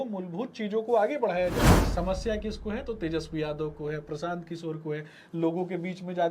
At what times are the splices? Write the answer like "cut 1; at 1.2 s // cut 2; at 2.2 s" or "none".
cut 1; at 1.7 s